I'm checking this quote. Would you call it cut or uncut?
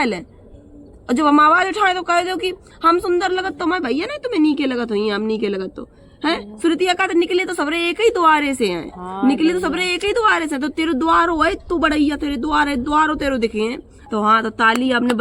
cut